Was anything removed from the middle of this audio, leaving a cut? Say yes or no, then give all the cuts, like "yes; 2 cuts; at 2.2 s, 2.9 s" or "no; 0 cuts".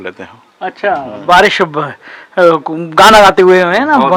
no; 0 cuts